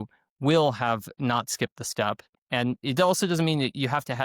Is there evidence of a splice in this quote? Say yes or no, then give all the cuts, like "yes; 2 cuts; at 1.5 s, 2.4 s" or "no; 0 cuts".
yes; 1 cut; at 2.3 s